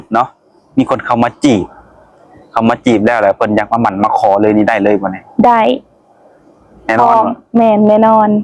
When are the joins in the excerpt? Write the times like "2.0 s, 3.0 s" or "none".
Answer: none